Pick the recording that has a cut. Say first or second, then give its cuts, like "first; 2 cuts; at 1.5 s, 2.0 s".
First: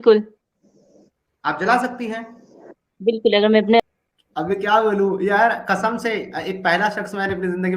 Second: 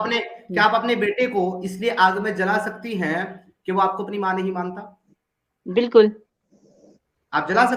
first; 1 cut; at 3.8 s